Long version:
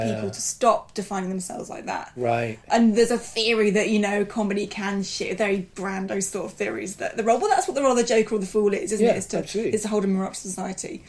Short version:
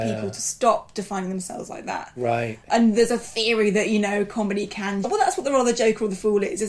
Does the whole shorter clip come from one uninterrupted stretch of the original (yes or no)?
no